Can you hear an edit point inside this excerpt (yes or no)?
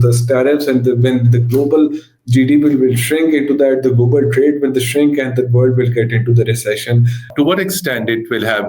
yes